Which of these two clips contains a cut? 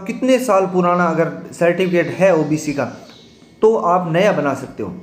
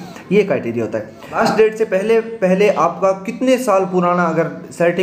second; 1 cut; at 1.4 s

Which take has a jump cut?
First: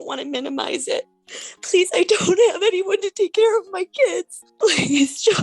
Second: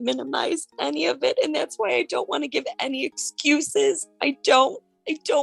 first; 2 cuts; at 1.2 s, 4.4 s

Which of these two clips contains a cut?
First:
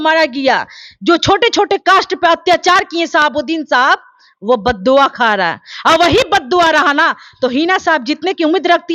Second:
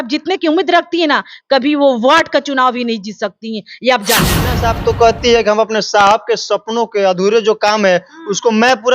second; 1 cut; at 4.5 s

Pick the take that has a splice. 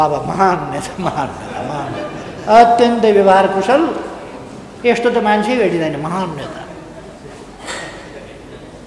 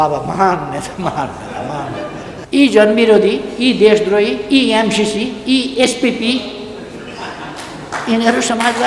second; 1 cut; at 2.4 s

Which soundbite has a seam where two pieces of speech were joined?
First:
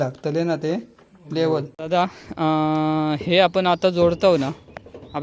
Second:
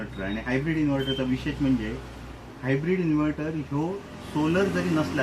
first; 1 cut; at 1.7 s

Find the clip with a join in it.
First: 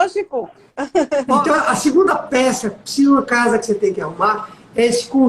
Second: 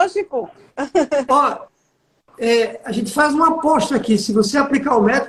first; 1 cut; at 1.4 s

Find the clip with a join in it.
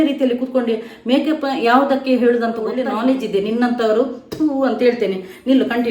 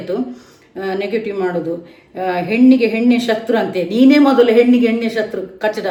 first; 1 cut; at 2.7 s

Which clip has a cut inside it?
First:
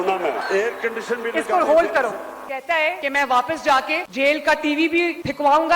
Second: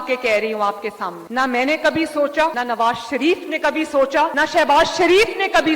first; 2 cuts; at 2.4 s, 4.0 s

